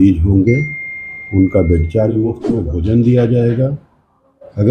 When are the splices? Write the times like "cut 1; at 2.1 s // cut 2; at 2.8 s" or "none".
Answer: cut 1; at 2.4 s